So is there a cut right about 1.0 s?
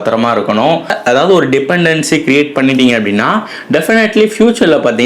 yes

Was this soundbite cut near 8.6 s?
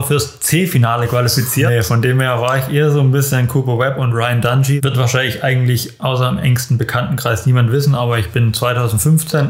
no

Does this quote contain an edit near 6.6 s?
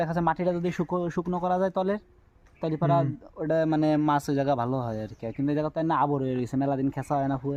no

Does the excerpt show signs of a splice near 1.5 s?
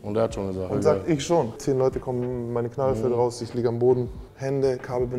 yes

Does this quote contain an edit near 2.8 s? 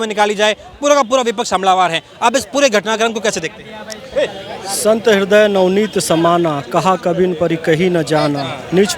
no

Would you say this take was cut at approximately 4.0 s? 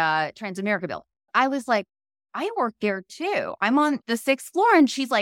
yes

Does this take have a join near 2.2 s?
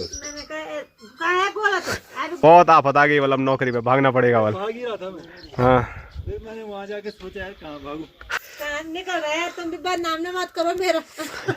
yes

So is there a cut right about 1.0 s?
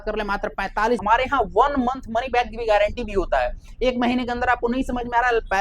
yes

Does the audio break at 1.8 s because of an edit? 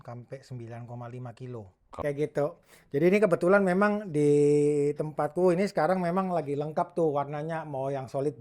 yes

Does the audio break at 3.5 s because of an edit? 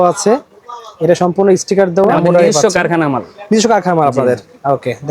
no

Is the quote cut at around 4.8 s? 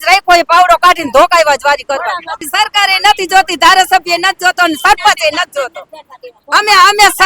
no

